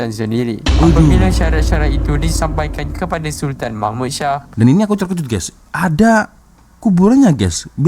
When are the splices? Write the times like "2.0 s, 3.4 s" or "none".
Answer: 4.5 s